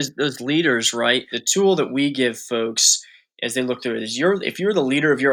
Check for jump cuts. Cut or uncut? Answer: cut